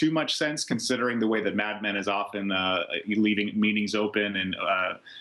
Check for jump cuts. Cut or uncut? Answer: uncut